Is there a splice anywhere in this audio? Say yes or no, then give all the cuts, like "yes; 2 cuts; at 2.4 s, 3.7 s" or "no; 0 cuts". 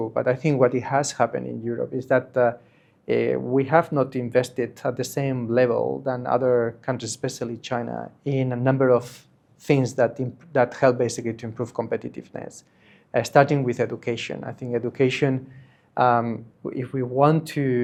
no; 0 cuts